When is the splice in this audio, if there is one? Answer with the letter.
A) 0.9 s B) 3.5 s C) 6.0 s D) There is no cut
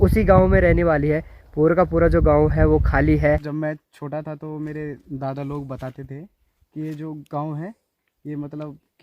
B